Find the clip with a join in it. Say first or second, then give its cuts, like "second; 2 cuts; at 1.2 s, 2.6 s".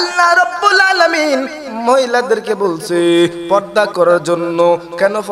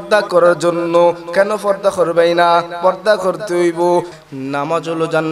second; 1 cut; at 4.2 s